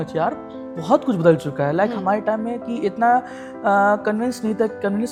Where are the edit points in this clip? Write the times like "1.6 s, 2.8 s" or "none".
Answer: none